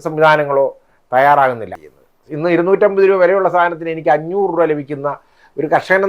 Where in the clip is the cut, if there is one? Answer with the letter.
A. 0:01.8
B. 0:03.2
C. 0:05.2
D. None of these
A